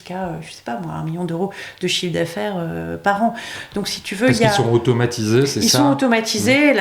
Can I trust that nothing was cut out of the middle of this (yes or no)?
yes